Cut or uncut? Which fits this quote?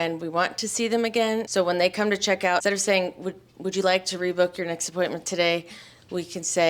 cut